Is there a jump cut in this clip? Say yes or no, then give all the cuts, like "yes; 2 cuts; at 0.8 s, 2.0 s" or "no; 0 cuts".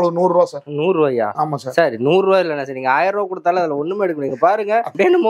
no; 0 cuts